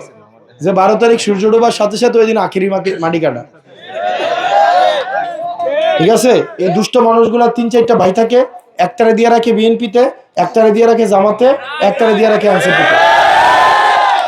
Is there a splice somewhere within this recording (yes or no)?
yes